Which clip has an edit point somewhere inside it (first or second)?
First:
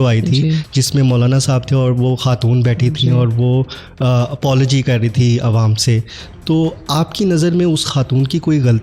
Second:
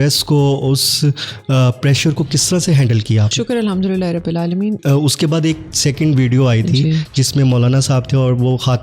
second